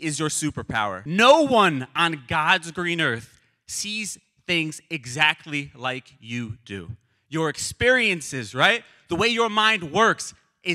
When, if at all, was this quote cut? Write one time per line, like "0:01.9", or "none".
0:01.0